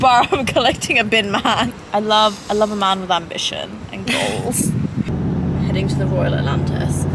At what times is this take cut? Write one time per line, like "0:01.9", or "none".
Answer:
0:01.8
0:05.1